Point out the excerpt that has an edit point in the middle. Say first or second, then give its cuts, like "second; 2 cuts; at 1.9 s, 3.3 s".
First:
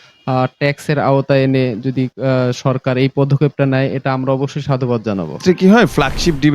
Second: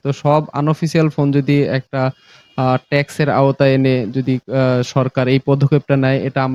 first; 1 cut; at 5.4 s